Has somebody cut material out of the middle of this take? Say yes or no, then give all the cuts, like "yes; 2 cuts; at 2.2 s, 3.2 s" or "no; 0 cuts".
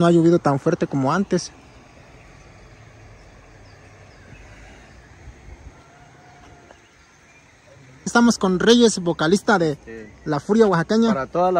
yes; 1 cut; at 8.1 s